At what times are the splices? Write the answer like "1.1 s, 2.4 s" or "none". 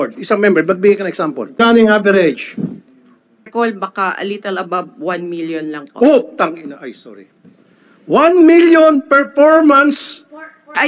1.5 s, 3.5 s